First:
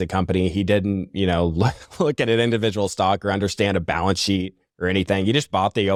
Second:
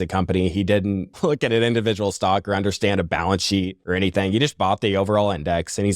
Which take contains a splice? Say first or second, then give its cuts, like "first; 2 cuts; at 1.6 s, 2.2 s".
second; 2 cuts; at 1.1 s, 3.8 s